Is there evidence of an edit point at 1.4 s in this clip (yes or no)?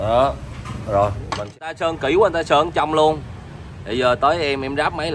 yes